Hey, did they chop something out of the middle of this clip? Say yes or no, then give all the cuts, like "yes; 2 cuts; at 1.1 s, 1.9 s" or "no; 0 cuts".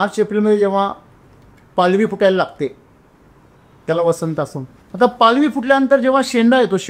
no; 0 cuts